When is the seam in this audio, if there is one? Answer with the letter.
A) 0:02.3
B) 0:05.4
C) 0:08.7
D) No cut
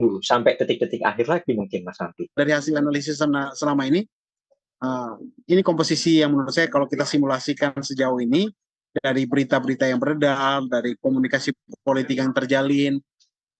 A